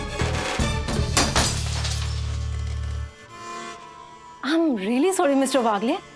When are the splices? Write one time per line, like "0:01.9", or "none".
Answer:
none